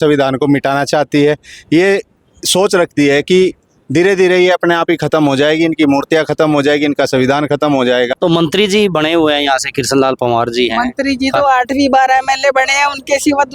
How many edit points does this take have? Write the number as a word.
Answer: one